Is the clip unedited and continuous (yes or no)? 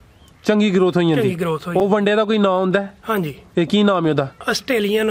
yes